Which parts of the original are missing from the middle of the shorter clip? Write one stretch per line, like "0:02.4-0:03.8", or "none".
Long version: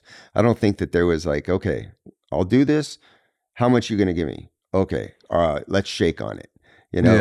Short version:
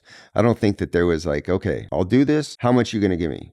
0:01.8-0:02.2
0:02.9-0:03.5